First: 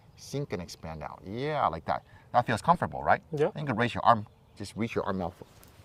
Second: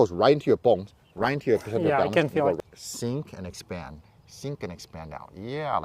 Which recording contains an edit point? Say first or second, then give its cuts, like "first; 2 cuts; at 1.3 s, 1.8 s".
second; 1 cut; at 2.6 s